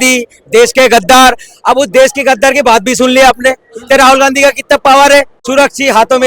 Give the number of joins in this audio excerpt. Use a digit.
1